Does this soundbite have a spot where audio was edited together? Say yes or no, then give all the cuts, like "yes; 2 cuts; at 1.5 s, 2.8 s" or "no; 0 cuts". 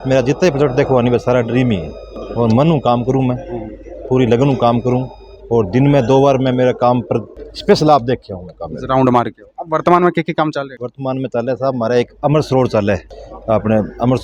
no; 0 cuts